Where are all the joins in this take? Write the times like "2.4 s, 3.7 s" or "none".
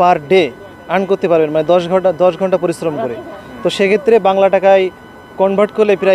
none